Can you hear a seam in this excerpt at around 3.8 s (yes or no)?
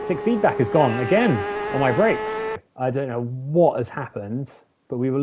no